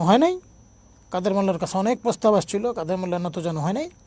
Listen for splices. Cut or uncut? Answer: uncut